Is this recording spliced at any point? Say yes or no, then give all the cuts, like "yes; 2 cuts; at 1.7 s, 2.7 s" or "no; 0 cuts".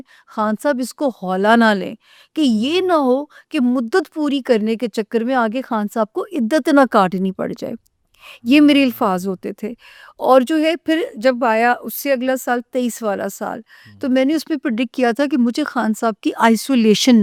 no; 0 cuts